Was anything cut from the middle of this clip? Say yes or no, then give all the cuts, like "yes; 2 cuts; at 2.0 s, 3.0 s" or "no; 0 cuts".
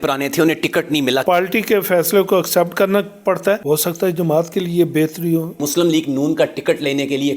yes; 3 cuts; at 1.2 s, 3.6 s, 5.6 s